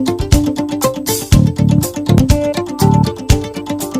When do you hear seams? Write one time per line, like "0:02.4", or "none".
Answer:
0:02.7